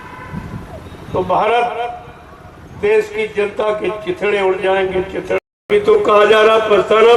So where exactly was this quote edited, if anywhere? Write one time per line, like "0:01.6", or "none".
0:05.7